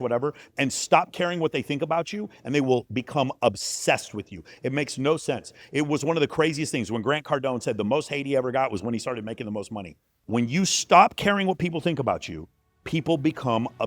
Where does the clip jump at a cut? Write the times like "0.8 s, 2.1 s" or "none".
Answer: 10.2 s